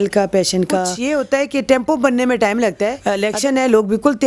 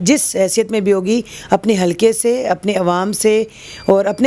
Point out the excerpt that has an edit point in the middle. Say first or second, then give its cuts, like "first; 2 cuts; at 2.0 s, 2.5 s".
first; 2 cuts; at 0.9 s, 3.1 s